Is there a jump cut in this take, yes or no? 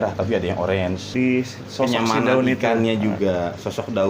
yes